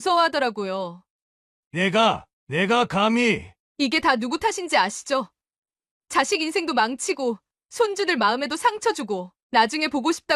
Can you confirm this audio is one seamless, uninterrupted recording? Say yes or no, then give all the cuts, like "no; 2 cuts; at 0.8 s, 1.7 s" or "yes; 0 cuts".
yes; 0 cuts